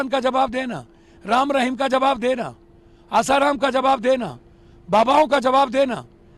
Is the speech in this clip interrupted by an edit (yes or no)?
no